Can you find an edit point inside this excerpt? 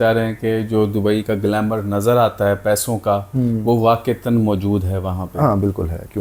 no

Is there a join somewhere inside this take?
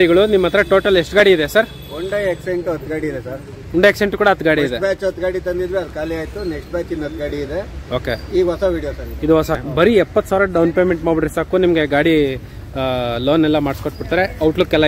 yes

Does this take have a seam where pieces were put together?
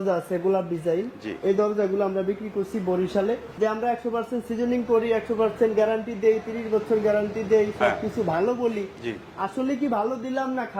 yes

